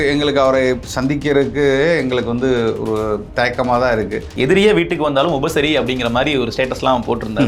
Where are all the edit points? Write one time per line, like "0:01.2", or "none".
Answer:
0:04.2